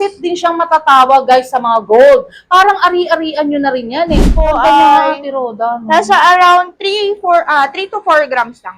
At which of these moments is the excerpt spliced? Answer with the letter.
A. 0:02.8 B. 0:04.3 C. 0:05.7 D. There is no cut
B